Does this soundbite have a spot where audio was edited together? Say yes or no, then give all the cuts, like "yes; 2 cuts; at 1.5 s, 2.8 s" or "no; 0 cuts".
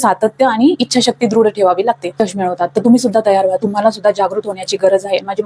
yes; 1 cut; at 2.2 s